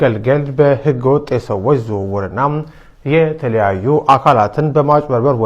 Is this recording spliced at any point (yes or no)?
no